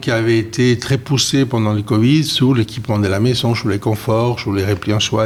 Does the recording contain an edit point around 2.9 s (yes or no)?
no